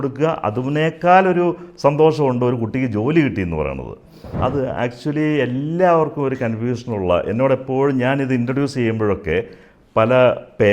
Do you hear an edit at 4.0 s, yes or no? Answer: yes